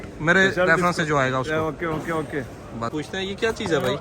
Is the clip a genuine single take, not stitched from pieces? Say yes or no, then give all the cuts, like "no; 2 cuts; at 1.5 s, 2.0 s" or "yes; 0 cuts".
no; 1 cut; at 2.9 s